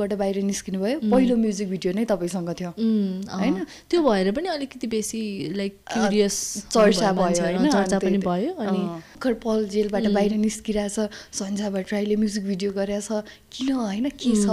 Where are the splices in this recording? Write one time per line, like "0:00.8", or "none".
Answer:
0:09.1